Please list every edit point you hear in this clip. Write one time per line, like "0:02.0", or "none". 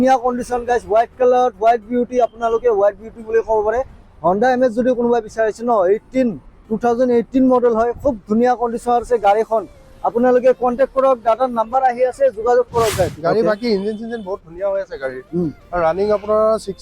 0:13.2